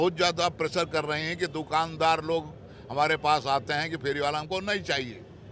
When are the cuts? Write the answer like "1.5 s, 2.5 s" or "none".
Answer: none